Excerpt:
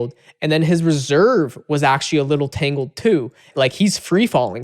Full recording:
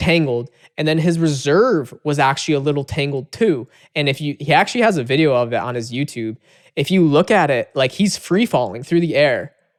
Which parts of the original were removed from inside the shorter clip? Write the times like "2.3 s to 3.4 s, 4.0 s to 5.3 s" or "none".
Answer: 3.8 s to 7.7 s